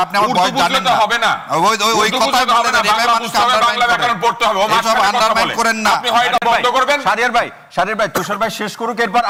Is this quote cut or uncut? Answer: uncut